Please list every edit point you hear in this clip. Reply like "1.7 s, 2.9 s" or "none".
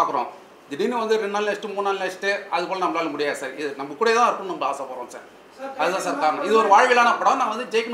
none

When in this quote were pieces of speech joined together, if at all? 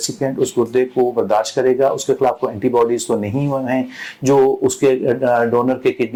none

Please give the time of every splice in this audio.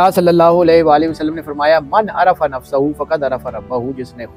none

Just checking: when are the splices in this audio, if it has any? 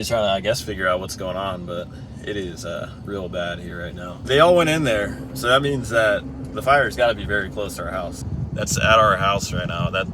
4.1 s, 8.2 s

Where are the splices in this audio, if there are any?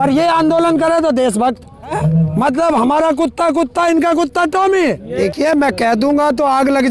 2.0 s, 5.1 s

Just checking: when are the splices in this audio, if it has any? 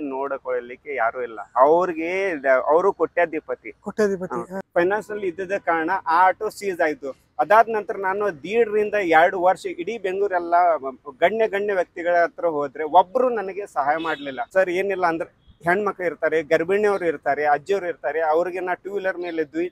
4.6 s, 14.5 s

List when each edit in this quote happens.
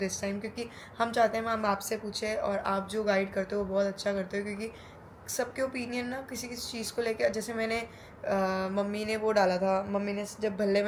none

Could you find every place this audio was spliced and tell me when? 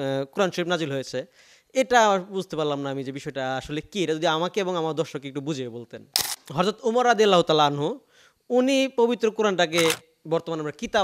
6.2 s

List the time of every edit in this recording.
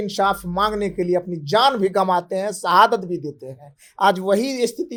none

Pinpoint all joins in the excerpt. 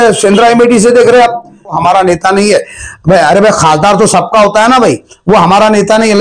1.8 s

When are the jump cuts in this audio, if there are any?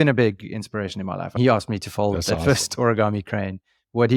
none

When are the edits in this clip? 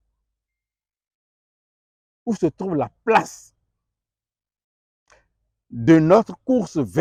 none

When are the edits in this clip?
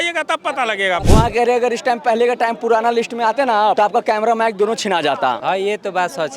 1.0 s, 3.8 s, 5.4 s

